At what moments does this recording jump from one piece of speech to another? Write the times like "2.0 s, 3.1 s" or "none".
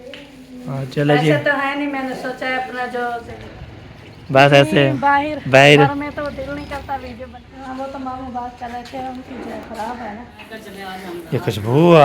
3.2 s, 7.3 s, 10.4 s